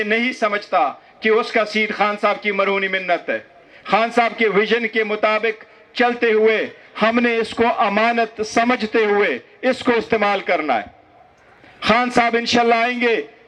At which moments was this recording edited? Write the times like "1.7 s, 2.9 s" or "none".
none